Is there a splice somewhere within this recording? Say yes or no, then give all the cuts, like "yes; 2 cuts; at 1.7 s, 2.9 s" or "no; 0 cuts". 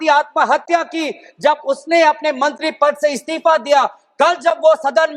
no; 0 cuts